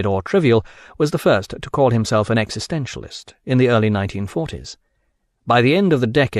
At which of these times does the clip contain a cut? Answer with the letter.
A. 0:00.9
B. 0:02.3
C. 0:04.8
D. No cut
B